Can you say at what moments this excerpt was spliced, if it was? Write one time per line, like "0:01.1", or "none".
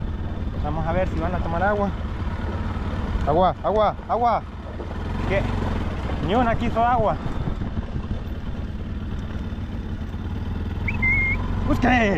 none